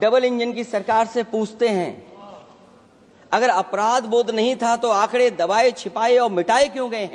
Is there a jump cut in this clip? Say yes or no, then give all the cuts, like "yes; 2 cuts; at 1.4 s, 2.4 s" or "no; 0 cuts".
no; 0 cuts